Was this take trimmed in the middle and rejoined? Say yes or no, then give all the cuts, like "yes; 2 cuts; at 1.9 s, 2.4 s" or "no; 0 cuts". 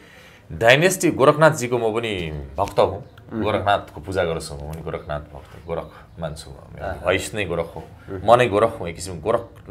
no; 0 cuts